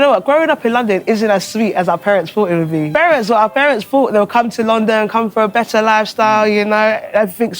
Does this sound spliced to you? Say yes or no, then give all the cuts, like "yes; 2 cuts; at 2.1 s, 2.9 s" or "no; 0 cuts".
yes; 1 cut; at 2.9 s